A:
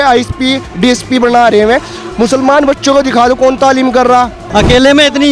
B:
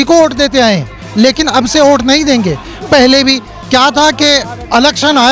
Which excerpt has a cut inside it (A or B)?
A